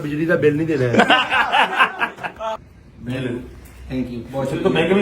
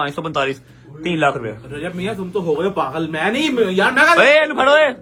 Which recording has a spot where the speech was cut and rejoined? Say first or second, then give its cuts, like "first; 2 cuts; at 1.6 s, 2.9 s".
first; 1 cut; at 2.5 s